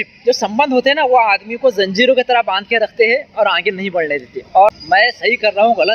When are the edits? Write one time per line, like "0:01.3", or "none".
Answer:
0:04.7